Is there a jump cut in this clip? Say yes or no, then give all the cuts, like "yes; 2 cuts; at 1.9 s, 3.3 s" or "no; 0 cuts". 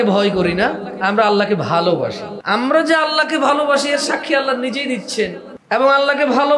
yes; 2 cuts; at 2.3 s, 5.5 s